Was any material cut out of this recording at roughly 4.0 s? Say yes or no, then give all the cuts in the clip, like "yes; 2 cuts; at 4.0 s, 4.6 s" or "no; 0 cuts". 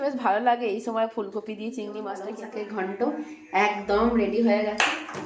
no; 1 cut; at 2.4 s